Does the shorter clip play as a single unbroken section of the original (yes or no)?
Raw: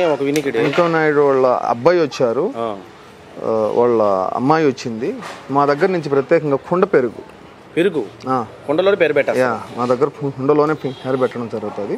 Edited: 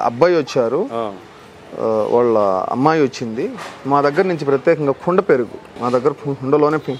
no